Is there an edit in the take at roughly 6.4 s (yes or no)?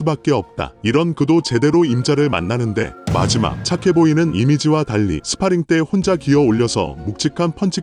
no